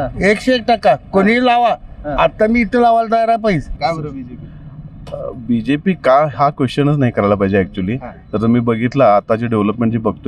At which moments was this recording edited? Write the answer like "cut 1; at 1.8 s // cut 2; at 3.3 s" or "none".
cut 1; at 3.7 s